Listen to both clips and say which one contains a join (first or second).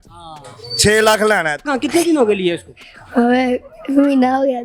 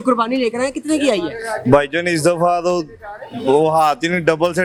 first